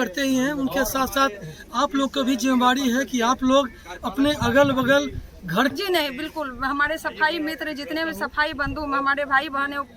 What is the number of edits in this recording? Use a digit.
1